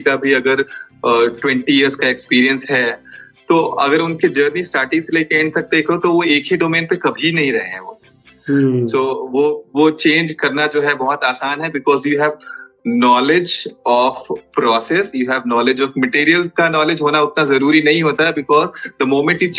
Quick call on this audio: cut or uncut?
cut